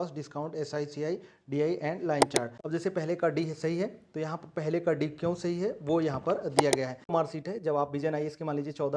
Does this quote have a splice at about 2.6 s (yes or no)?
yes